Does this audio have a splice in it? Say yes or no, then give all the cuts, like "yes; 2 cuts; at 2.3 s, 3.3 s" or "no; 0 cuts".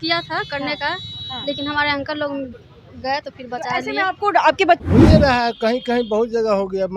yes; 1 cut; at 4.8 s